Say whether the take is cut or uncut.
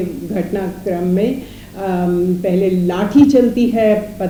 uncut